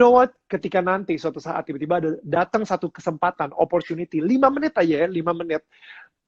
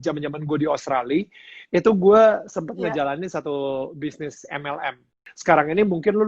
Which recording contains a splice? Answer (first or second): second